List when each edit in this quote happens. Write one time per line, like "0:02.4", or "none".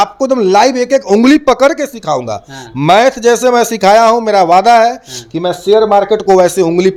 none